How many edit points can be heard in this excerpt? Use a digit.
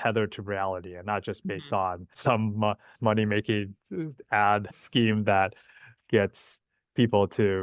1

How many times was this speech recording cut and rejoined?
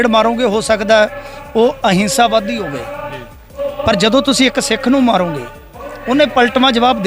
0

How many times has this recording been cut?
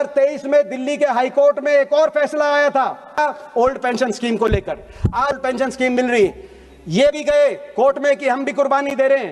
2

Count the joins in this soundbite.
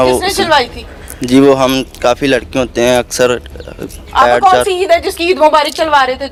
0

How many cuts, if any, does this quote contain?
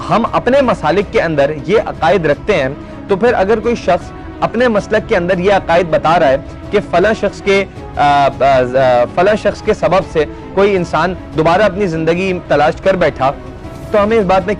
0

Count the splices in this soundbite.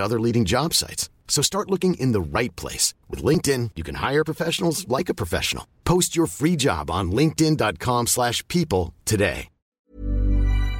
1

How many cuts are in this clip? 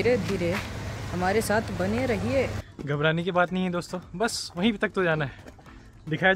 1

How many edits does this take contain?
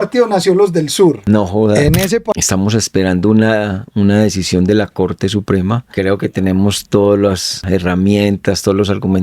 4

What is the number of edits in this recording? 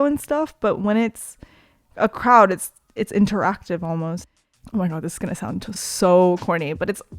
1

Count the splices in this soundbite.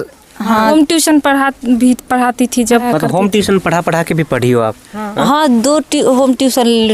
2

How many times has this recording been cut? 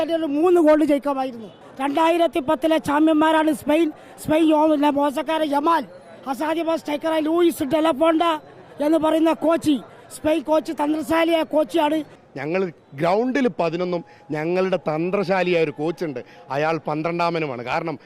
2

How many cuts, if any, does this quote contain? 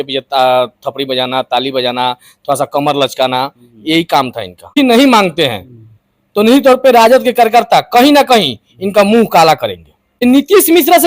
2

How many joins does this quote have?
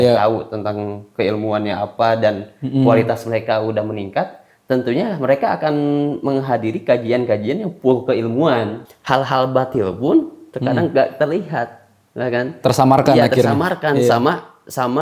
1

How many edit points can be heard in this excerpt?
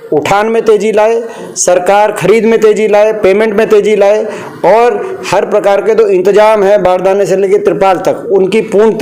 0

